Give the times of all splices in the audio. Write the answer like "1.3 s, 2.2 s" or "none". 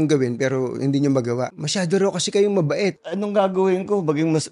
1.6 s, 3.1 s